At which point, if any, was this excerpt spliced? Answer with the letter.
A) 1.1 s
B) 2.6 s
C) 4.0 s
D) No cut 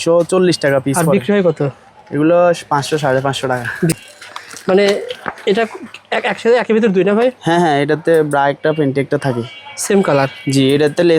C